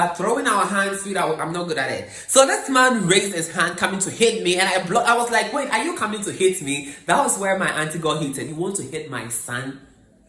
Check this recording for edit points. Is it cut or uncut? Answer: cut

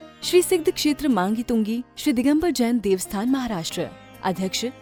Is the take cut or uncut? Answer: uncut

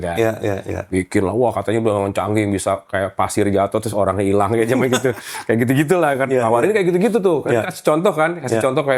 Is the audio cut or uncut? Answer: uncut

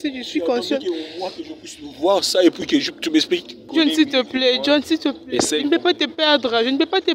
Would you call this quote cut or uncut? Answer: cut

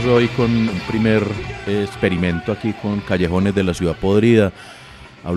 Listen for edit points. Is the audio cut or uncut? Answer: cut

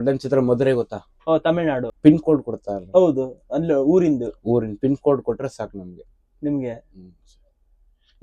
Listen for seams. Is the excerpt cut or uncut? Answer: cut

